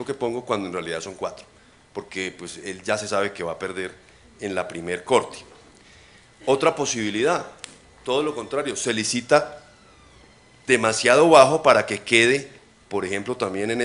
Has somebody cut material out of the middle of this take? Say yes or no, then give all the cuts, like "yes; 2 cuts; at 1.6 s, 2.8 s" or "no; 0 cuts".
no; 0 cuts